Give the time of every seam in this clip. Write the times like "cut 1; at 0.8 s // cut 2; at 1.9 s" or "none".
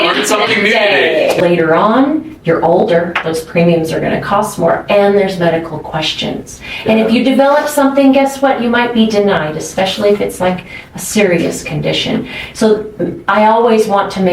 cut 1; at 1.4 s